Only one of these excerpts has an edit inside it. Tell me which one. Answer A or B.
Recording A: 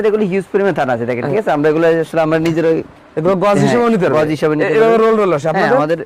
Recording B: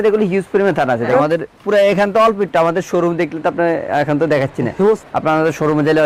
B